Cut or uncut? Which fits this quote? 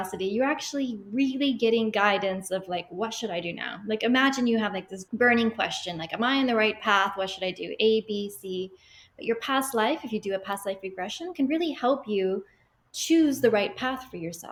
uncut